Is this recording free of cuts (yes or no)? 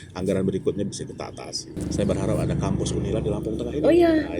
no